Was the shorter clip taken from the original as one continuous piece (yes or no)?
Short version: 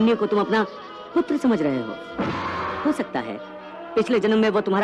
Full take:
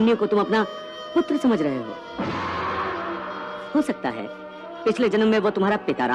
no